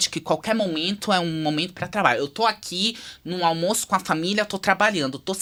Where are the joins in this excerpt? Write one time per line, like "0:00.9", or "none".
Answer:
none